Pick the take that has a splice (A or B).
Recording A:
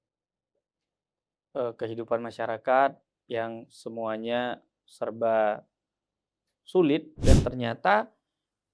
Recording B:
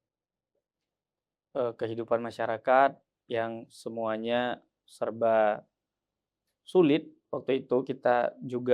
A